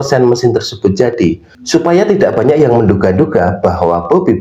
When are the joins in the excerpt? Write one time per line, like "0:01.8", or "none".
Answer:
none